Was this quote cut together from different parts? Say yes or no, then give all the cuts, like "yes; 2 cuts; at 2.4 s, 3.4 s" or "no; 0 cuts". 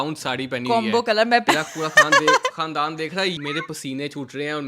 yes; 2 cuts; at 1.4 s, 3.4 s